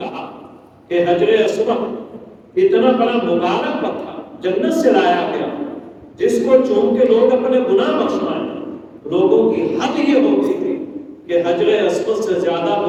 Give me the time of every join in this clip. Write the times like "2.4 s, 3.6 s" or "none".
none